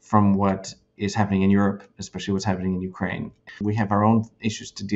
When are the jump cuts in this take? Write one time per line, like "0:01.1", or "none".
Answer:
0:03.5